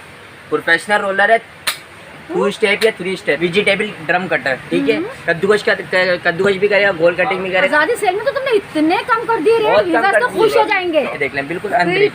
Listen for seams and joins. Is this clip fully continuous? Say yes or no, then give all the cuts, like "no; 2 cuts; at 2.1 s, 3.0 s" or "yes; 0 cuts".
no; 3 cuts; at 3.4 s, 7.7 s, 11.1 s